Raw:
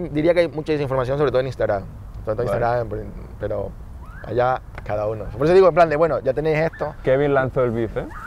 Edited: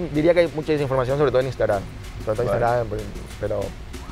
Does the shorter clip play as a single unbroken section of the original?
yes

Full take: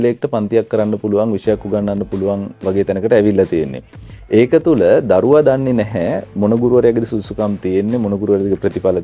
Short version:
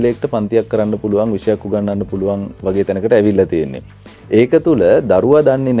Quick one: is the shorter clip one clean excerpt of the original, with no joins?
yes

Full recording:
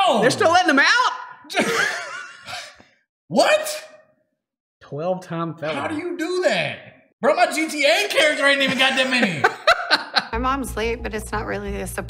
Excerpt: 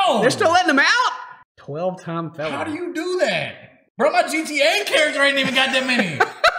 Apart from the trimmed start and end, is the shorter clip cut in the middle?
yes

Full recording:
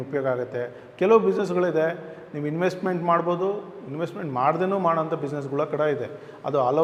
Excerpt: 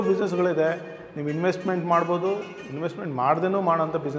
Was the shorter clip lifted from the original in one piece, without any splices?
yes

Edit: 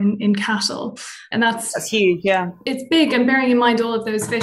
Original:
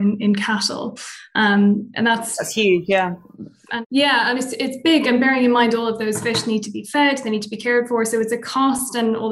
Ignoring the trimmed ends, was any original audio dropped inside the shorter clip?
yes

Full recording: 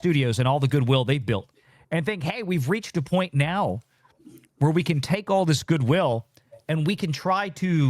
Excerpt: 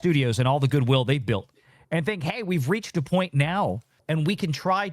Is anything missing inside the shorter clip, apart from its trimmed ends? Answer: yes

